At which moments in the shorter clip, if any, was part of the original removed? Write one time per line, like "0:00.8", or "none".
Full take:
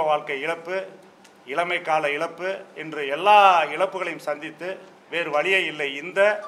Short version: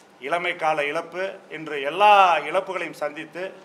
none